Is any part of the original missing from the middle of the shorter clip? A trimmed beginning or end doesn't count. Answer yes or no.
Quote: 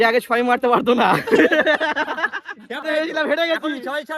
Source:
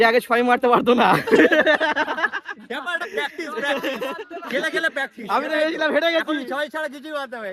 yes